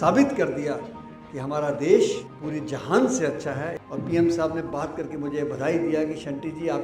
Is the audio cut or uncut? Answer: cut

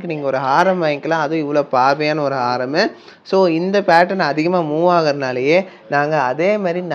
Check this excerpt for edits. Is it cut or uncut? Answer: uncut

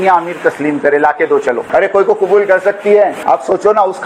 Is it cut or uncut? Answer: cut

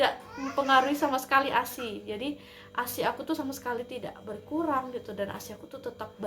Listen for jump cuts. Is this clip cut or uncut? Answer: uncut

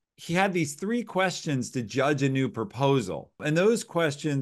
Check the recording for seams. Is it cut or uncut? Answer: cut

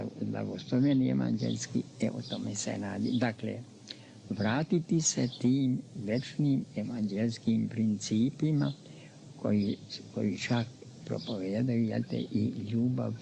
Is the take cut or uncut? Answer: uncut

